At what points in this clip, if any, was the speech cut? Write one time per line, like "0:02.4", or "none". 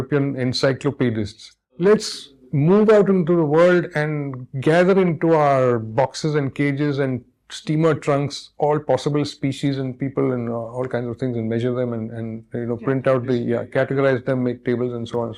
none